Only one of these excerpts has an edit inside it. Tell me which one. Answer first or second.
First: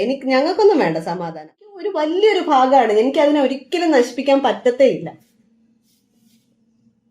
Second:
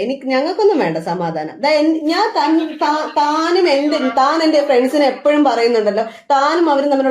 first